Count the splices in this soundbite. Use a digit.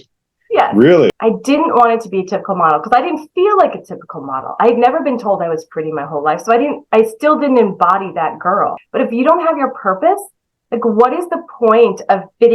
2